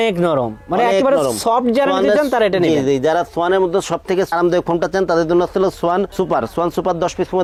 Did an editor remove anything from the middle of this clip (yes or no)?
no